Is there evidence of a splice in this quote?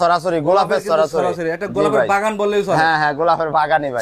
no; 0 cuts

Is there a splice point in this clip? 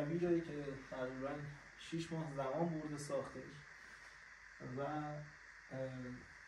no; 0 cuts

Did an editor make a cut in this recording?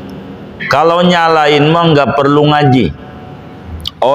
no; 0 cuts

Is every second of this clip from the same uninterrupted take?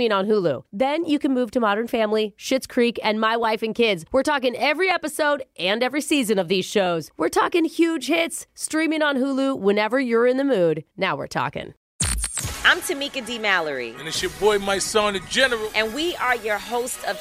no; 1 cut; at 11.8 s

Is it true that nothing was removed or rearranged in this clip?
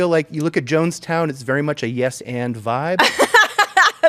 yes; 0 cuts

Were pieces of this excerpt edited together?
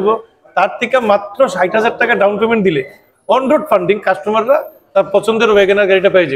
no; 0 cuts

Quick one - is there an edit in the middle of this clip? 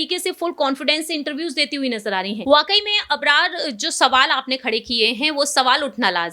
yes; 1 cut; at 2.4 s

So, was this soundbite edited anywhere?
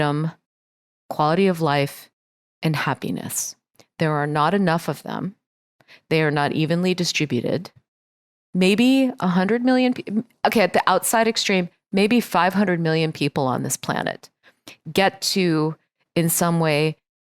yes; 1 cut; at 8.4 s

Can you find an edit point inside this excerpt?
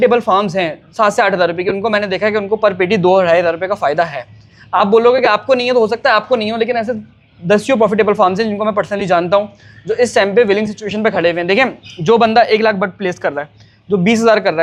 no; 0 cuts

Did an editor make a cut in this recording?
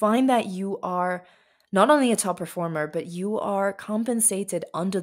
no; 0 cuts

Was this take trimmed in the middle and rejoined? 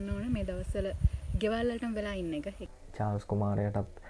yes; 1 cut; at 2.8 s

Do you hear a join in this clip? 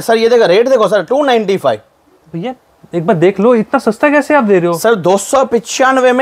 no; 0 cuts

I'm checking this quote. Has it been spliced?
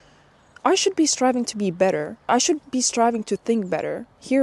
yes; 1 cut; at 2.3 s

